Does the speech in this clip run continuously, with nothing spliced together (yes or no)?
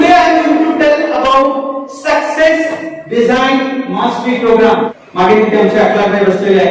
no